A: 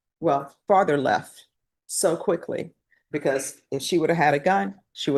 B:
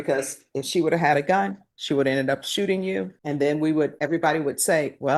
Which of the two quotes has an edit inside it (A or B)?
B